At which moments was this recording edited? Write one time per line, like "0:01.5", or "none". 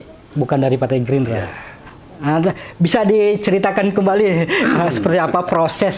none